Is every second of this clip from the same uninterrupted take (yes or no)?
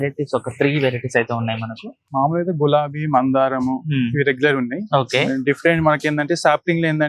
no